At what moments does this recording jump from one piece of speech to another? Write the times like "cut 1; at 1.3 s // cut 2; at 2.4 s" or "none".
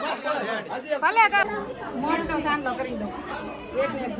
cut 1; at 1.4 s